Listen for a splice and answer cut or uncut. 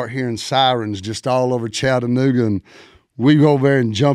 uncut